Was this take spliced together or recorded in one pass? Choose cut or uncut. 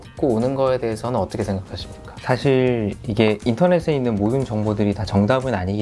uncut